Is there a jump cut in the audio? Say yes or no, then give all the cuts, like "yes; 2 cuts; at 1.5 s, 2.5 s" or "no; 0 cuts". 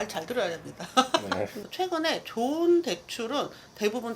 yes; 1 cut; at 1.5 s